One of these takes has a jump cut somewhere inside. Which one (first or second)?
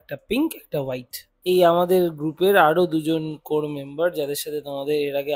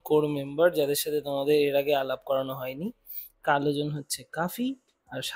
first